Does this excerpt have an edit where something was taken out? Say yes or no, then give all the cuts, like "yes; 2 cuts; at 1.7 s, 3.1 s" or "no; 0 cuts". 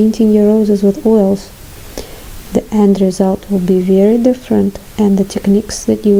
no; 0 cuts